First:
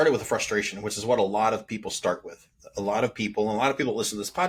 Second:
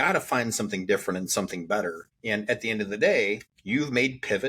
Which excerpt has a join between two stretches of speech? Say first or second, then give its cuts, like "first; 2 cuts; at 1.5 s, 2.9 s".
second; 2 cuts; at 2.1 s, 3.5 s